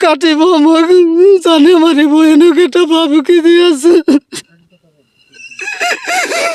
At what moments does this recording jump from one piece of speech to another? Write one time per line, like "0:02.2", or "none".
none